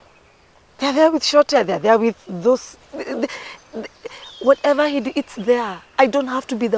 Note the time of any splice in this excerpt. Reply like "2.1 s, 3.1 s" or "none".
none